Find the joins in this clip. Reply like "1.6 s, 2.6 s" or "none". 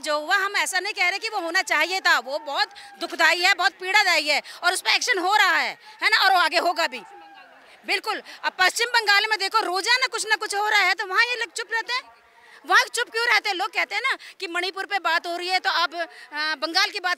none